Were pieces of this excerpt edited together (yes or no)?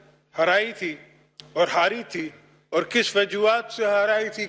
no